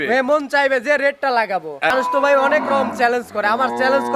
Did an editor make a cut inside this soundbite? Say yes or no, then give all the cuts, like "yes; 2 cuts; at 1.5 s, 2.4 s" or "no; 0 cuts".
yes; 1 cut; at 1.9 s